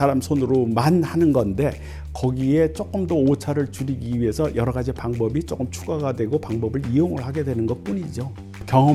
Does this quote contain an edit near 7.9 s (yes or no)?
no